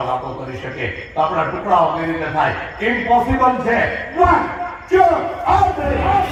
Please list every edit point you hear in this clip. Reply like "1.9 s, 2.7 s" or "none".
none